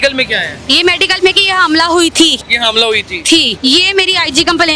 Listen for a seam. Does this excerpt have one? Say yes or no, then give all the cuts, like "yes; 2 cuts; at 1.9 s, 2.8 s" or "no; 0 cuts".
yes; 2 cuts; at 2.5 s, 3.5 s